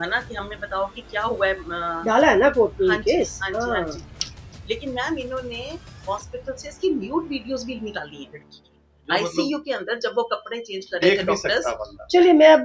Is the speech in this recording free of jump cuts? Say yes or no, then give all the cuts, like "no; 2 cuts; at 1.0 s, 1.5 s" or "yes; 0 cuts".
yes; 0 cuts